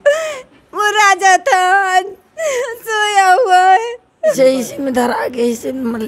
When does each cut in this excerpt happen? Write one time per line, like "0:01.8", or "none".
0:04.3